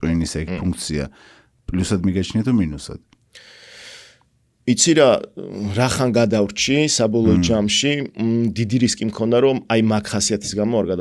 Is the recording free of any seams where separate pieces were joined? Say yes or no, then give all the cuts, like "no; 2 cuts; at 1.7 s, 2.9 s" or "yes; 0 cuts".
yes; 0 cuts